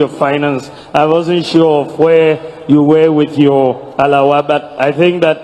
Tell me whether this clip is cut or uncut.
uncut